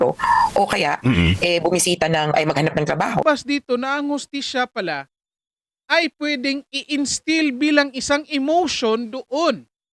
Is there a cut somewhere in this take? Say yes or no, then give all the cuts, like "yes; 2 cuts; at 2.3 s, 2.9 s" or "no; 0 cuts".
yes; 1 cut; at 3.2 s